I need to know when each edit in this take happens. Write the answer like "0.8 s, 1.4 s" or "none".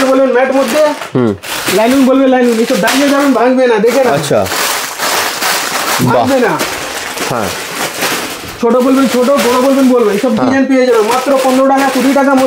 none